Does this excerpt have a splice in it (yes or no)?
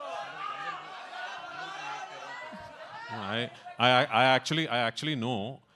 no